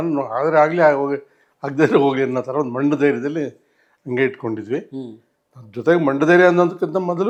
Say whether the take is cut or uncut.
uncut